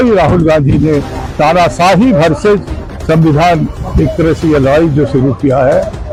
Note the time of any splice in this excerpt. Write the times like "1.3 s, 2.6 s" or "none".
none